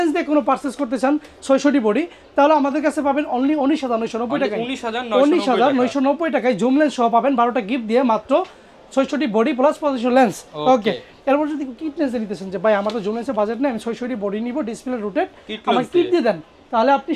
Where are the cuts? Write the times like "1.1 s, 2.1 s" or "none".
none